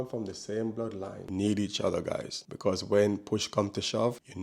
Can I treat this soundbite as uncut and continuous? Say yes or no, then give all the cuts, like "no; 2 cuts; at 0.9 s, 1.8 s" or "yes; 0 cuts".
no; 1 cut; at 1.2 s